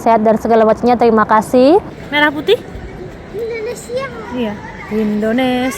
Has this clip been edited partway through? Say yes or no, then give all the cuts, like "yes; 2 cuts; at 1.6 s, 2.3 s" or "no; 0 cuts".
yes; 1 cut; at 2.0 s